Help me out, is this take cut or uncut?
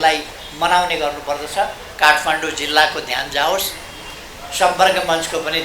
uncut